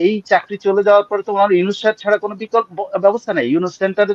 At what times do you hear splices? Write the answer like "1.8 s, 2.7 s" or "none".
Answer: none